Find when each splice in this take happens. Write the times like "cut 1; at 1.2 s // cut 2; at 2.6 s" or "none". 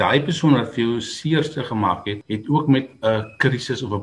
cut 1; at 2.2 s